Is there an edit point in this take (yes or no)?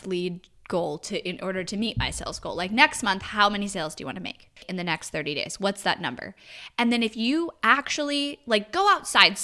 yes